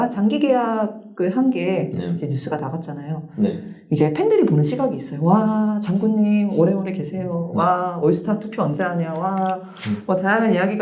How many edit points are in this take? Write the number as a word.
zero